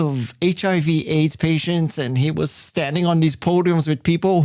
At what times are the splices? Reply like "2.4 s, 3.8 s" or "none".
none